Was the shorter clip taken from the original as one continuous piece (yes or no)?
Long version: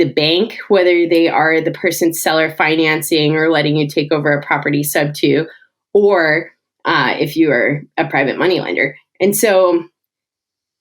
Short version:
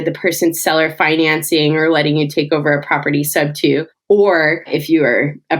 no